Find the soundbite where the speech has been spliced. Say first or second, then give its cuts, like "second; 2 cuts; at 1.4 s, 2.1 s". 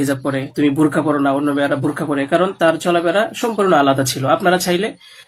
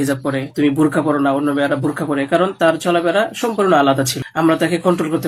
second; 1 cut; at 4.2 s